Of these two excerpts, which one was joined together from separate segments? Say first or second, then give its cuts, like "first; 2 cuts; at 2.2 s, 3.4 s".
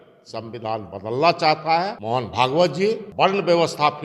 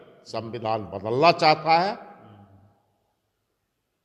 first; 2 cuts; at 2.0 s, 3.1 s